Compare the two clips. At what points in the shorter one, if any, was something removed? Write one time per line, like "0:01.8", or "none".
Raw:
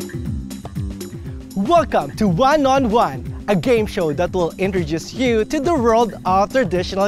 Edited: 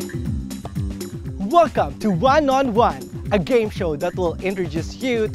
0:01.3